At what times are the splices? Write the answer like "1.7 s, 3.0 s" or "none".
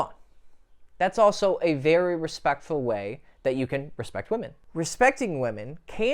4.5 s